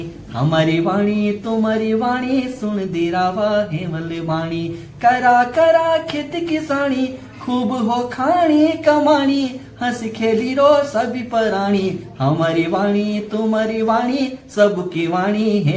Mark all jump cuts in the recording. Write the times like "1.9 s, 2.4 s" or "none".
none